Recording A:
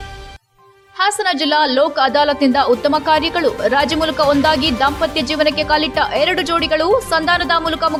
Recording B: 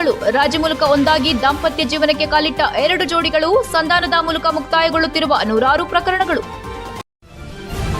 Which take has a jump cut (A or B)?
B